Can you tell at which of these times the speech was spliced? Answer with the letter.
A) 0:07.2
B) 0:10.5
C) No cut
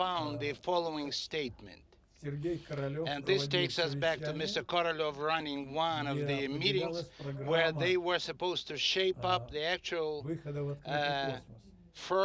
B